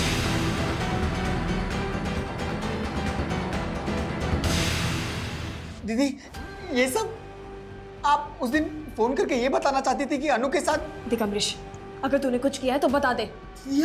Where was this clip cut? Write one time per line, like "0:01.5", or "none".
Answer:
0:05.7